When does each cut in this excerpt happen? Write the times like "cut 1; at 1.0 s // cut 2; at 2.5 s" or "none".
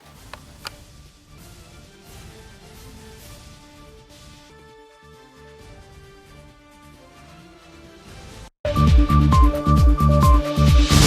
cut 1; at 8.4 s